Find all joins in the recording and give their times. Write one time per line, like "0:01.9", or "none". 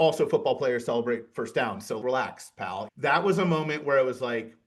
0:02.9